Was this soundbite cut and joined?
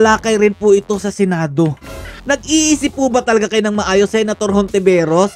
no; 0 cuts

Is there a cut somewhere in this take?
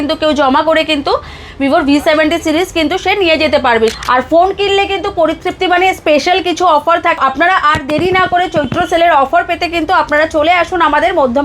yes; 2 cuts; at 3.9 s, 7.2 s

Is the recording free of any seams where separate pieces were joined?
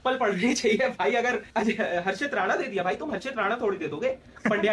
yes; 0 cuts

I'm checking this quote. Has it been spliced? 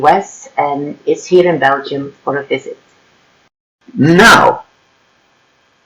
yes; 1 cut; at 3.8 s

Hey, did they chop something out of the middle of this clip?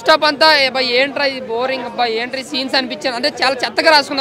no; 0 cuts

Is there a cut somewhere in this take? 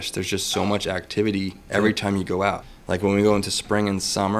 yes; 1 cut; at 2.7 s

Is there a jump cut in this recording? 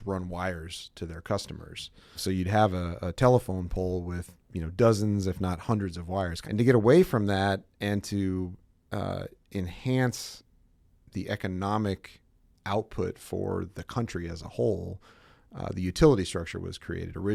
no; 0 cuts

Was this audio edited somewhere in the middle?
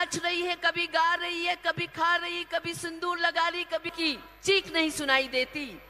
yes; 1 cut; at 3.9 s

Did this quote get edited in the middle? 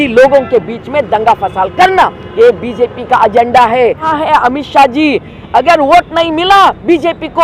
yes; 1 cut; at 4.1 s

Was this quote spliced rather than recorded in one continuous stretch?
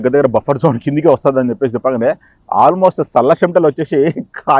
no; 0 cuts

